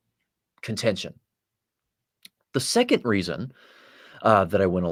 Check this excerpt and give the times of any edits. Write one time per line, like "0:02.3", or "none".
none